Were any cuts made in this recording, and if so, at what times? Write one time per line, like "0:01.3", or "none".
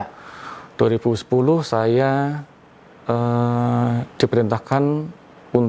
none